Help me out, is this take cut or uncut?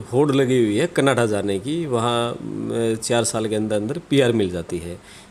uncut